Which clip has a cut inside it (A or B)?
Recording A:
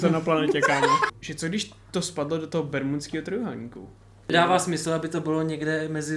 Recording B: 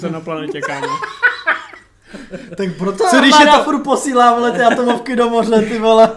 A